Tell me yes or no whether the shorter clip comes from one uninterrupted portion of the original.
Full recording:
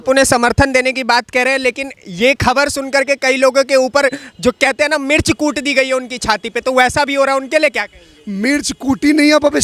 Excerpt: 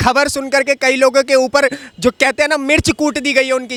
yes